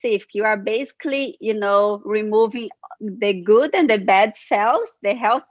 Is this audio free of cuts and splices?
yes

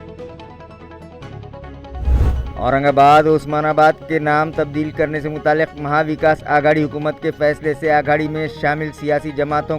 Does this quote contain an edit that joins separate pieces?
yes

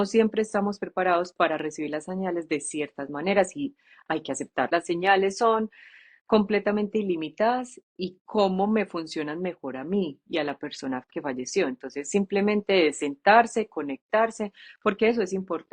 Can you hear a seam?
yes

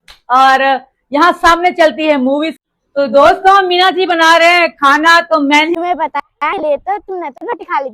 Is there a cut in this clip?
yes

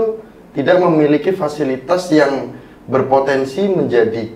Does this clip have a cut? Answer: no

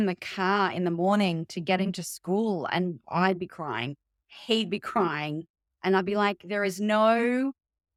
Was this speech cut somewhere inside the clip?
no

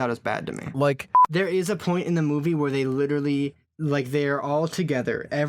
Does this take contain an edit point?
yes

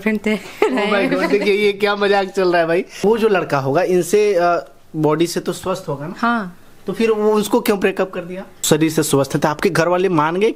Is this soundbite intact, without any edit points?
no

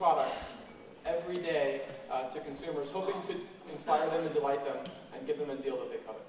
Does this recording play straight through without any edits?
yes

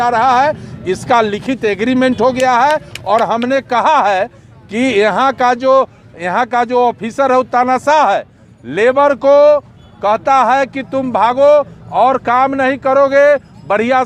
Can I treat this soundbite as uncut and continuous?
yes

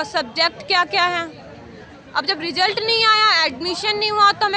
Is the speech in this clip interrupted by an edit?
no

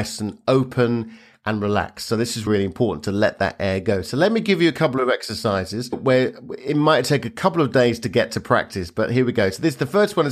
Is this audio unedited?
yes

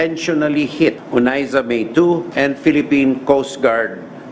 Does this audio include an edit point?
yes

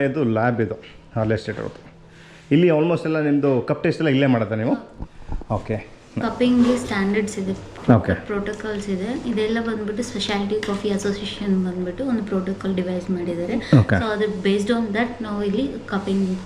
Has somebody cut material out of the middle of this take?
yes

